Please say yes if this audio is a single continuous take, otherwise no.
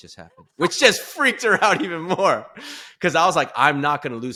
yes